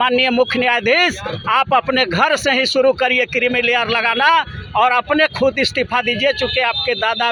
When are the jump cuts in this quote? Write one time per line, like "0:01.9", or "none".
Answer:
none